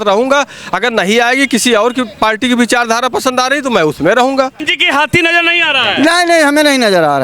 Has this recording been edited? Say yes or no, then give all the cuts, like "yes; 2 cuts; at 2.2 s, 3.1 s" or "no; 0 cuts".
yes; 1 cut; at 4.6 s